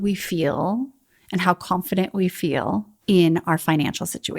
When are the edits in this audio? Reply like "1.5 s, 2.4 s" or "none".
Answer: 2.9 s

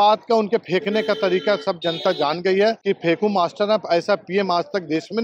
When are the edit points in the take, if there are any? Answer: 2.8 s

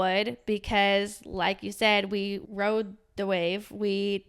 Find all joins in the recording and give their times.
2.4 s

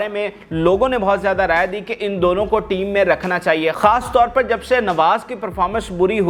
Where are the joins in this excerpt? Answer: none

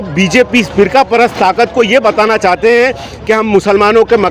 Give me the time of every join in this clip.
none

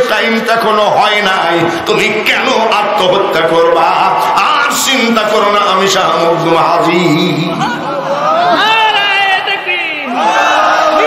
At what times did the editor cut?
none

